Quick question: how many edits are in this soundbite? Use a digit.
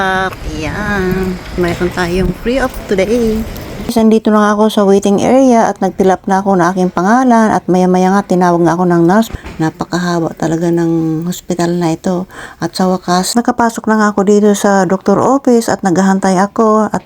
4